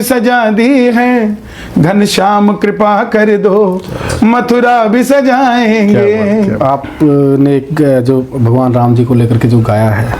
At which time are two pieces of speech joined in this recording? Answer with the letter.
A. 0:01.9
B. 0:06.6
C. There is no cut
B